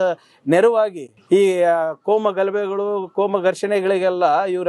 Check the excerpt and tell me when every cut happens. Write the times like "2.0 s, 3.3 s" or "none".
1.1 s